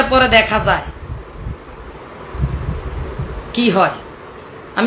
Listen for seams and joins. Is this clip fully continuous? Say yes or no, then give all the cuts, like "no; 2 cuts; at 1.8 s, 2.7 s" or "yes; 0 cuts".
yes; 0 cuts